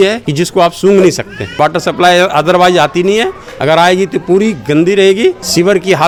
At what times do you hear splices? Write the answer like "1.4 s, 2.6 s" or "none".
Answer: none